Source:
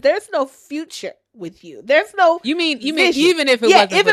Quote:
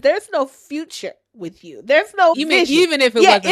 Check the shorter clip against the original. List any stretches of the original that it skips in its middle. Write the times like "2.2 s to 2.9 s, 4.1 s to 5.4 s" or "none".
2.4 s to 2.9 s